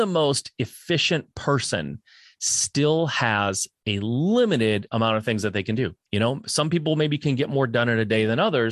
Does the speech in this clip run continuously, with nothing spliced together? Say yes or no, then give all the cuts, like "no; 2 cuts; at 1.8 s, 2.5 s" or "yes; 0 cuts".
no; 1 cut; at 6.0 s